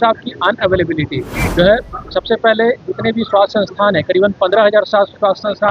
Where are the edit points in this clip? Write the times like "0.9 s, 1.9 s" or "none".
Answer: 1.4 s